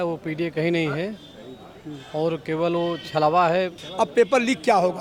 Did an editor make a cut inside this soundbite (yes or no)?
yes